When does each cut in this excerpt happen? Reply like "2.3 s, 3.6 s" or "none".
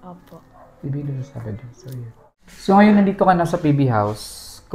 2.5 s